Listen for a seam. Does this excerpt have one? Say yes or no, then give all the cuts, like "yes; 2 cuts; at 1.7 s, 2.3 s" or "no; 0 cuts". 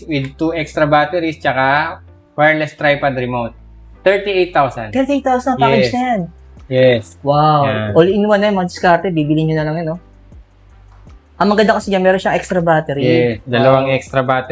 no; 0 cuts